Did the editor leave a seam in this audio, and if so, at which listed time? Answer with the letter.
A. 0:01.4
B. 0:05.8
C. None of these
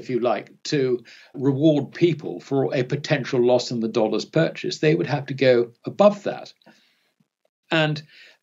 A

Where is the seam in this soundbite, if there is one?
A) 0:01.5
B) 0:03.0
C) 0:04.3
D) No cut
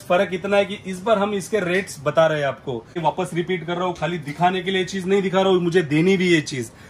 B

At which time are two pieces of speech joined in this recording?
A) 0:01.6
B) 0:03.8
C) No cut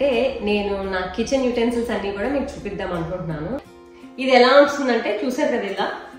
B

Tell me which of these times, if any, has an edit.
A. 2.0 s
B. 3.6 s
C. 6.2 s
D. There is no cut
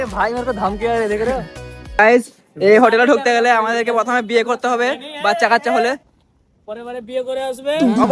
A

